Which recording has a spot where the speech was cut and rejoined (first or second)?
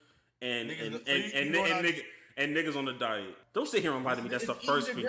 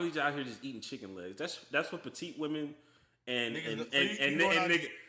first